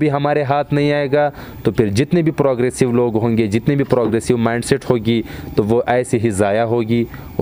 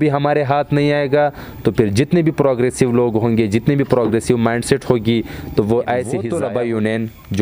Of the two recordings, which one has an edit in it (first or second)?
second